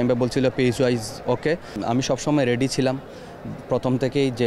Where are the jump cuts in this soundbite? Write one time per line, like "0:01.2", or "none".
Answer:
0:01.8